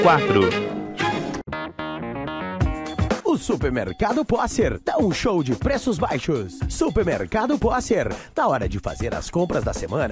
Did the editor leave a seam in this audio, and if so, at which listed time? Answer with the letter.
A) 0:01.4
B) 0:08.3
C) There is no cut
A